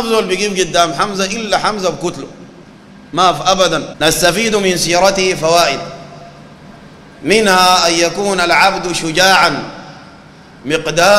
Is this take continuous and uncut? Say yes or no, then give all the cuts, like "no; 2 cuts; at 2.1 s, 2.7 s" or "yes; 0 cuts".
no; 1 cut; at 3.9 s